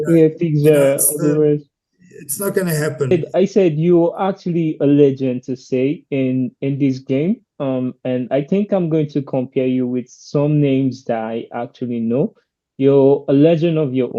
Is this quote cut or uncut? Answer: cut